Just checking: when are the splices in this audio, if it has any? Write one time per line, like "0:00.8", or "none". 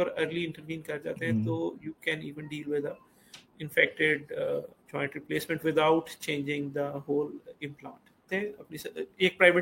0:08.3